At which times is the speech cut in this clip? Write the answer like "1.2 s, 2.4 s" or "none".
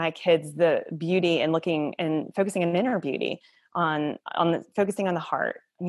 none